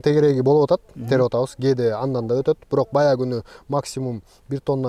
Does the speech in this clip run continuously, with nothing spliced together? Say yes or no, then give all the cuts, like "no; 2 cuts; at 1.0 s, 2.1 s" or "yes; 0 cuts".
yes; 0 cuts